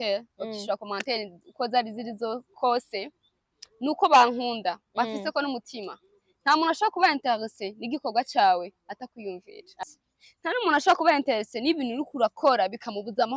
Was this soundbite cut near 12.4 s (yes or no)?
no